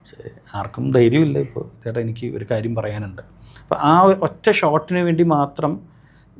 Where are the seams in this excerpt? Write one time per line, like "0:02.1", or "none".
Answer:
0:01.6